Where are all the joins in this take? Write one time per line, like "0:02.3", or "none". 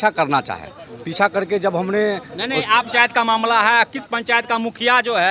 none